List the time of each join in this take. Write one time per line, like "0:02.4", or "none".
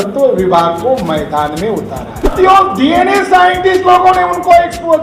0:02.3